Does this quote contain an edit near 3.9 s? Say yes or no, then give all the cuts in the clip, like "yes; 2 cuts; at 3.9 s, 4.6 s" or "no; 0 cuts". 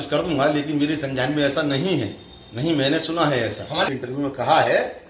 yes; 1 cut; at 3.9 s